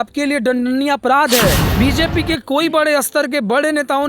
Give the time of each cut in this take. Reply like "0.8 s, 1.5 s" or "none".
1.6 s